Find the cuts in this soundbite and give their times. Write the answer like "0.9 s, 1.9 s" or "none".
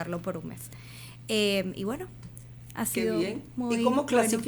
none